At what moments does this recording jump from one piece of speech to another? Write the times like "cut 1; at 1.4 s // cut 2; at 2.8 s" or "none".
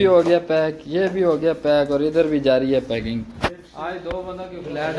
none